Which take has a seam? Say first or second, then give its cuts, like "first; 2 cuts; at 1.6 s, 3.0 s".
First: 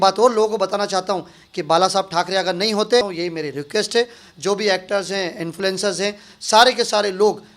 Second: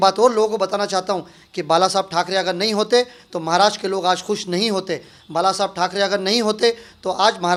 first; 1 cut; at 3.1 s